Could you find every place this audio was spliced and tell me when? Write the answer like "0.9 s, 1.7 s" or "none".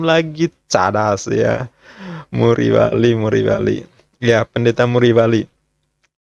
none